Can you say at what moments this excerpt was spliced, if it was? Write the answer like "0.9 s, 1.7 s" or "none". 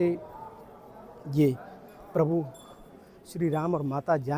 none

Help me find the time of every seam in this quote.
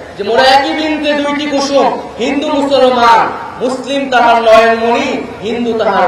none

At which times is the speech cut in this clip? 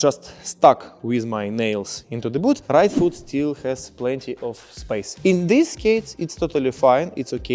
none

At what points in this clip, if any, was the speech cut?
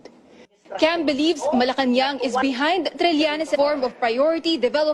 none

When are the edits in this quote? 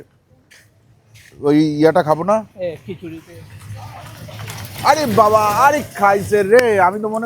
none

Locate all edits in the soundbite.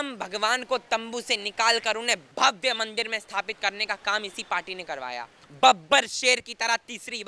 2.3 s, 5.4 s

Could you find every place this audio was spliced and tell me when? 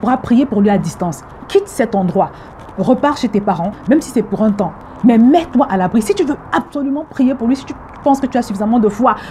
4.8 s

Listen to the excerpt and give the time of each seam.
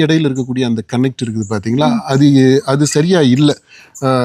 none

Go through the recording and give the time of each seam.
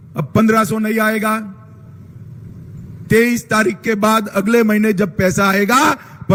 none

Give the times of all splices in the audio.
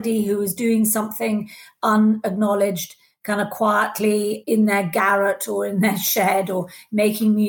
4.4 s

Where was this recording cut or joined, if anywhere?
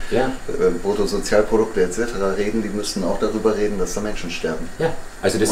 none

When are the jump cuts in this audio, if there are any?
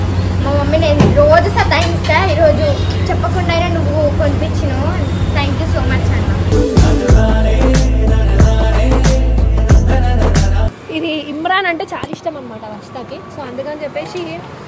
10.8 s

